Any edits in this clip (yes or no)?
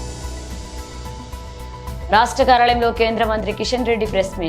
no